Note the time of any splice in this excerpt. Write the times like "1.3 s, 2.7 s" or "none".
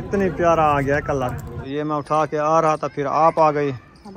1.5 s